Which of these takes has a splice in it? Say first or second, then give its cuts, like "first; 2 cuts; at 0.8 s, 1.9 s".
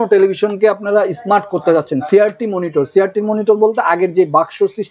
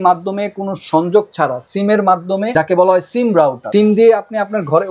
second; 2 cuts; at 2.5 s, 3.6 s